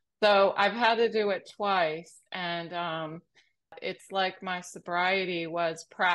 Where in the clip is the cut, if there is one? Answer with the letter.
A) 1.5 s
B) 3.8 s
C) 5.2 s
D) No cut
B